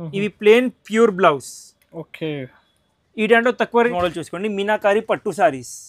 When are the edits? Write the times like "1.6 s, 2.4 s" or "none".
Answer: 3.9 s